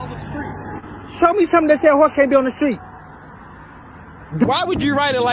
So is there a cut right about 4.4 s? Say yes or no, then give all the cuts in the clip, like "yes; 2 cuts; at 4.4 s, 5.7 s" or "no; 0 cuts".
yes; 1 cut; at 4.4 s